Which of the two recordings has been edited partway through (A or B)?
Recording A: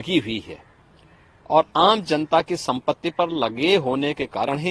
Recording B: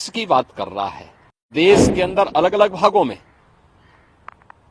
B